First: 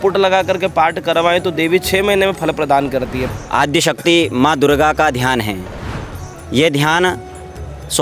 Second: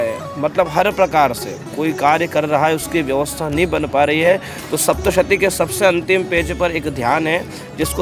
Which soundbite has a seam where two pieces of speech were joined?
first; 1 cut; at 3.2 s

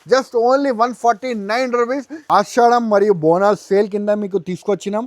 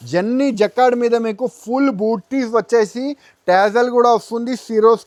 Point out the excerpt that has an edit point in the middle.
first; 1 cut; at 2.1 s

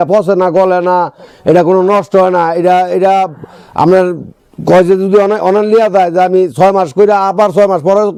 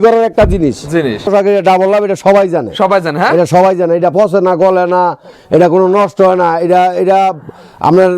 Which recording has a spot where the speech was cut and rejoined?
second; 1 cut; at 1.3 s

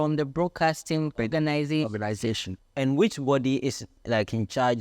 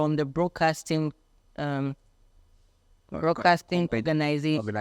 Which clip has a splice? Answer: first; 2 cuts; at 1.2 s, 2.5 s

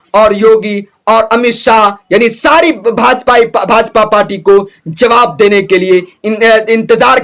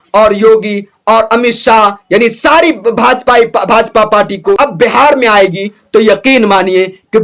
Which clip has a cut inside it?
second; 1 cut; at 4.5 s

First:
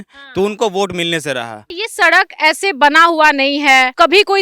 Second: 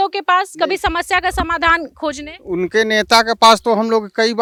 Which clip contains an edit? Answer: first; 1 cut; at 1.7 s

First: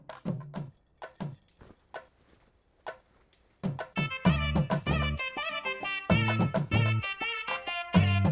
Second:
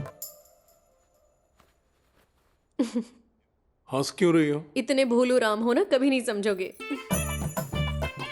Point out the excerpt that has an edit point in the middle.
second; 1 cut; at 6.9 s

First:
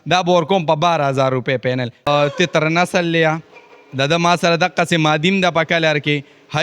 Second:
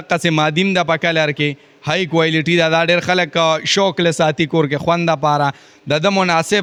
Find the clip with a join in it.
first; 1 cut; at 2.1 s

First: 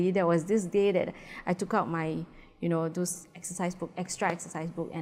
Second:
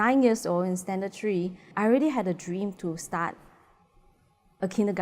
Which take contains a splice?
second; 1 cut; at 1.7 s

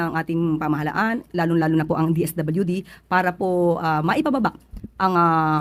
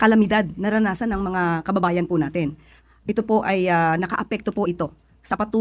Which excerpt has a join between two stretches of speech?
second; 1 cut; at 4.3 s

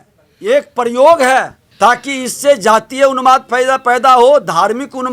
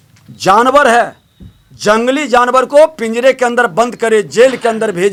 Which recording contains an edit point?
first; 1 cut; at 1.6 s

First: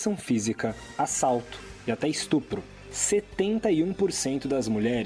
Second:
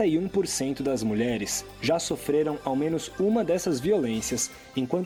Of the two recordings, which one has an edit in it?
first; 1 cut; at 2.7 s

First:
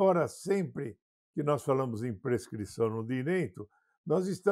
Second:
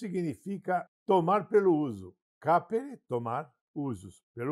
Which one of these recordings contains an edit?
second; 2 cuts; at 0.9 s, 3.6 s

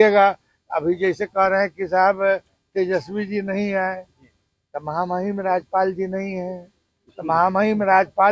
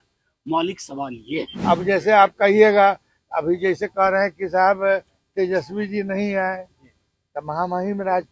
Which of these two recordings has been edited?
second; 1 cut; at 1.5 s

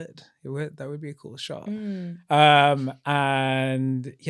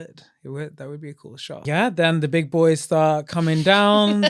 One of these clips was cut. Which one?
second; 1 cut; at 1.6 s

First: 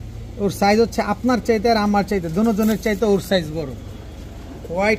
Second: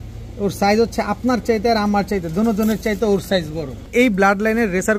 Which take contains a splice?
second; 1 cut; at 3.9 s

